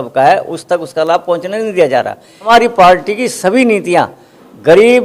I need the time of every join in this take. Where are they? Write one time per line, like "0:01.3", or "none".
0:02.5